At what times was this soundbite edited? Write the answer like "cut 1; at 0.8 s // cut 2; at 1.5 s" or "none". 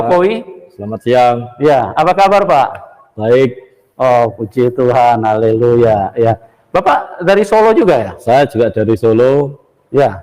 cut 1; at 1.7 s